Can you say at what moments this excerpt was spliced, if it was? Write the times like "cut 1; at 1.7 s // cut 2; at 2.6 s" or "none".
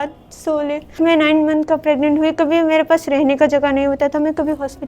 cut 1; at 1.0 s